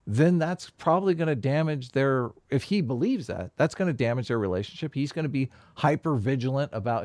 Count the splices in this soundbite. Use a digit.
0